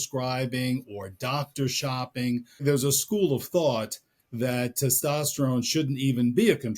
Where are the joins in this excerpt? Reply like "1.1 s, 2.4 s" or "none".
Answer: 2.6 s